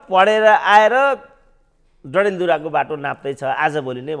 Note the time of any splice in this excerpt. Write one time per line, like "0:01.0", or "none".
none

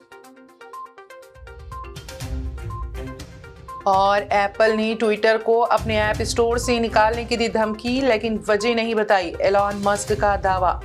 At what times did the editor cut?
none

